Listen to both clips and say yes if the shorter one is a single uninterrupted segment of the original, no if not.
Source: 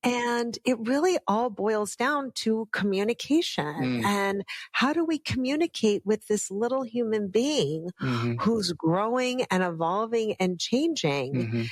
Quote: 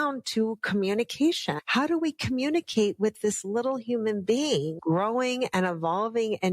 no